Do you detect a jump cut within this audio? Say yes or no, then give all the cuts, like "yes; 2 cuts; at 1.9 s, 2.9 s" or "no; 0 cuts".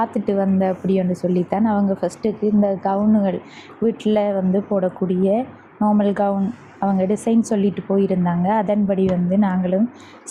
no; 0 cuts